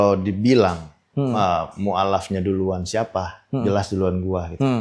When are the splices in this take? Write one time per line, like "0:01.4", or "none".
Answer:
none